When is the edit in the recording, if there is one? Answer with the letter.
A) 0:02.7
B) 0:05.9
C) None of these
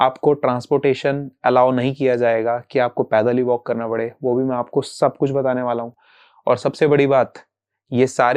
C